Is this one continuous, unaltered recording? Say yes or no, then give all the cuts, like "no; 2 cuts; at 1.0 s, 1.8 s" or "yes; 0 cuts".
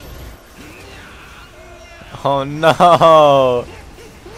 yes; 0 cuts